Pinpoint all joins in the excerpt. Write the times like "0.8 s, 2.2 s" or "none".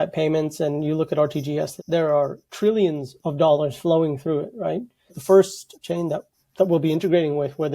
1.7 s, 5.2 s